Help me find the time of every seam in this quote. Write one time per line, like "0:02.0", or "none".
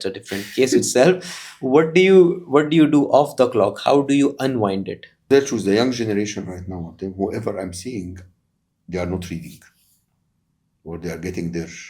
0:05.1